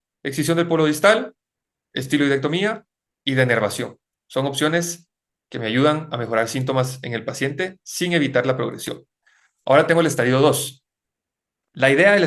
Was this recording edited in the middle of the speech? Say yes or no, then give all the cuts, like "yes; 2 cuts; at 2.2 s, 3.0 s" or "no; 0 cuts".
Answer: no; 0 cuts